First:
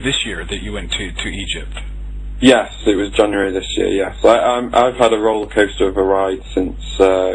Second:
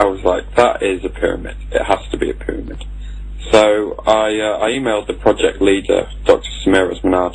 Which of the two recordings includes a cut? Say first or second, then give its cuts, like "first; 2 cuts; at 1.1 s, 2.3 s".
second; 1 cut; at 4.9 s